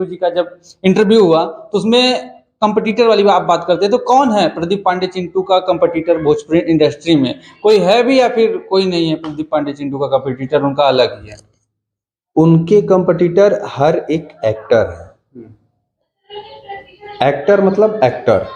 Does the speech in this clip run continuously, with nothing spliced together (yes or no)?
yes